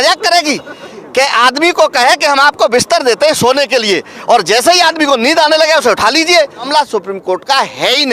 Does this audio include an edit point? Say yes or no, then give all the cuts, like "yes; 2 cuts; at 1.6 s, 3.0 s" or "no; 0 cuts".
yes; 1 cut; at 6.7 s